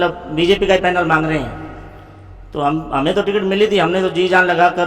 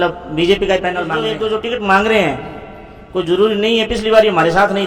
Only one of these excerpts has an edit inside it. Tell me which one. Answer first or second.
second